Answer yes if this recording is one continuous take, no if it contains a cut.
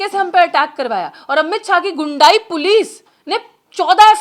yes